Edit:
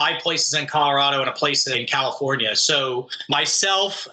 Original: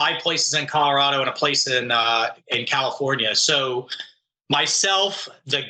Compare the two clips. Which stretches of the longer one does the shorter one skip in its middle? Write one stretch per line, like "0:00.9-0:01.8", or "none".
0:01.6-0:02.4
0:04.0-0:04.4